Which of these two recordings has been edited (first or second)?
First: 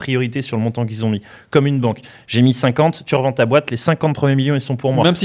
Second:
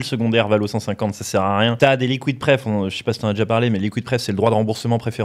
second